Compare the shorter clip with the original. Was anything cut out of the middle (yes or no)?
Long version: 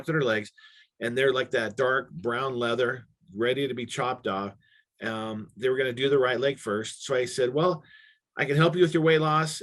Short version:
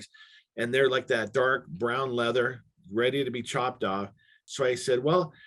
yes